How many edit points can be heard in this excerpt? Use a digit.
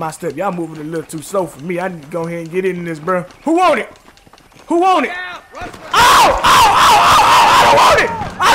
0